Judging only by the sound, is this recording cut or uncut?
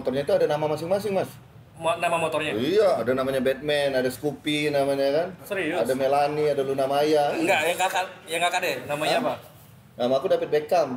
uncut